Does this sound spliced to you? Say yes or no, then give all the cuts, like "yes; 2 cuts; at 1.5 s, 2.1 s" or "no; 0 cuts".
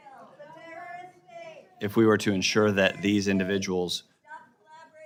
no; 0 cuts